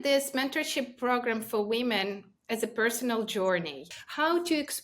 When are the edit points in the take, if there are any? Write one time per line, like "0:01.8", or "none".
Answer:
0:03.9

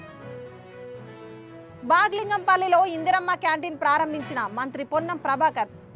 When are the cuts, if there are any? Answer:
none

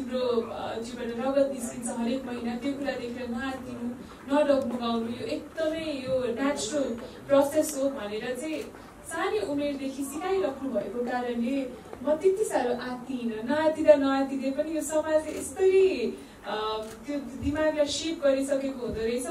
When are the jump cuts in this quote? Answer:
none

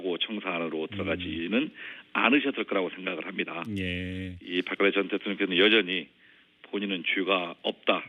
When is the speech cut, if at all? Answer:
0:01.7

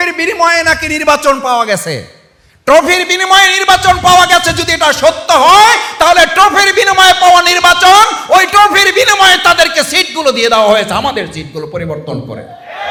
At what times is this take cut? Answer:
none

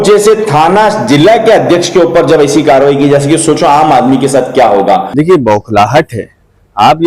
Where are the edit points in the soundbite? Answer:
0:05.1

